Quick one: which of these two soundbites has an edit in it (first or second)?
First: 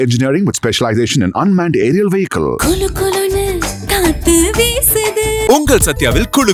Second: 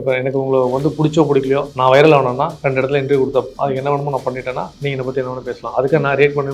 second